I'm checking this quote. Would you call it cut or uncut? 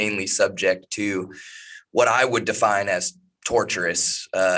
uncut